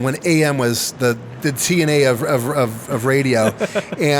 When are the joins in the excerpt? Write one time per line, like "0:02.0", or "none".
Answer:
0:01.3